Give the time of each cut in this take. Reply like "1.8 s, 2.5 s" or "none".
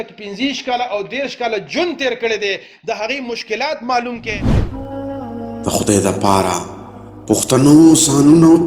4.7 s